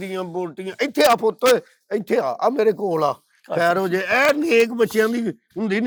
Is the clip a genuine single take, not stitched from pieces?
yes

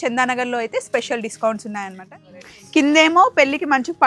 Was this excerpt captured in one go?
no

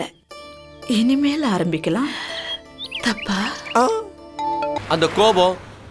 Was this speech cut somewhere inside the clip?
yes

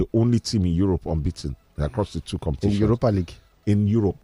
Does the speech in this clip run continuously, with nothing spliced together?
yes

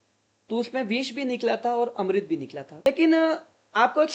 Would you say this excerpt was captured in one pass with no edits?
no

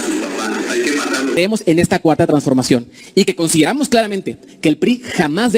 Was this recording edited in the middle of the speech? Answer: yes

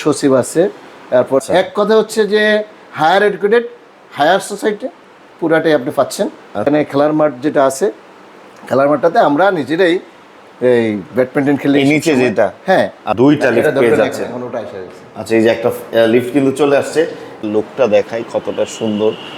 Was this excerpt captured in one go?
no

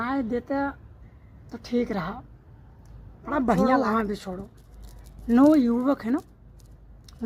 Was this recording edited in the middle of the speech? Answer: yes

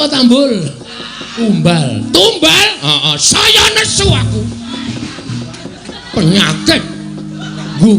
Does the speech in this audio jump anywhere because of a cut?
yes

